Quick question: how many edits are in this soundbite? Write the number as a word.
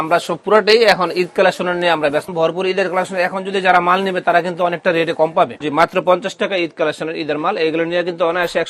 two